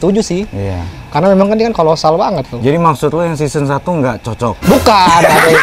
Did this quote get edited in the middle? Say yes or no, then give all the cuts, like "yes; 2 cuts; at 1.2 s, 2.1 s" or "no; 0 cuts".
no; 0 cuts